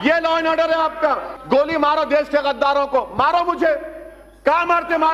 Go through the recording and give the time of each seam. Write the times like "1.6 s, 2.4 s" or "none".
1.3 s